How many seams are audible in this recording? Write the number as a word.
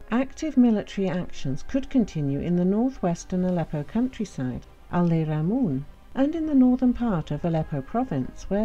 one